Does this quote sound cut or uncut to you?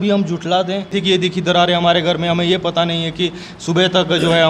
cut